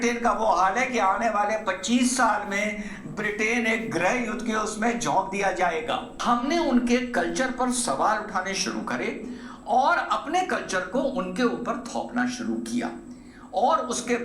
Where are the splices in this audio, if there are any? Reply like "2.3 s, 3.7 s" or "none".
6.1 s